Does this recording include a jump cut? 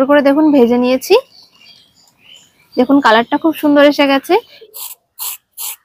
yes; 1 cut; at 4.6 s

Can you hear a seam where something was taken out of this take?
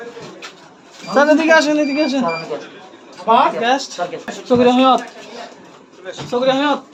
no; 0 cuts

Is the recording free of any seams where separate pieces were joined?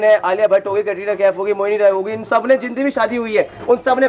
yes; 0 cuts

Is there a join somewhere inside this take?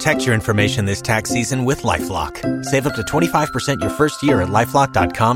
no; 0 cuts

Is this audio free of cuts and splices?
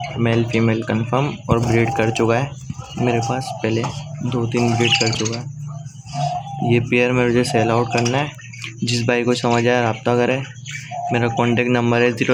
yes; 0 cuts

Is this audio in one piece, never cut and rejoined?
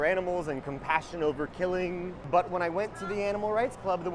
no; 1 cut; at 2.1 s

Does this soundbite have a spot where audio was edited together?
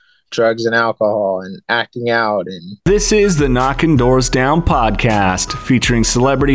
yes; 1 cut; at 2.7 s

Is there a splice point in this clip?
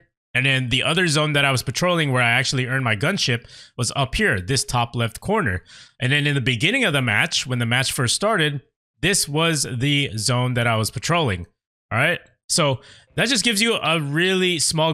no; 0 cuts

